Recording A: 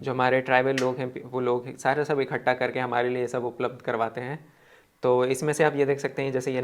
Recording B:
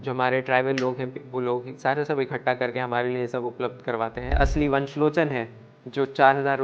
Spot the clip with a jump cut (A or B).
B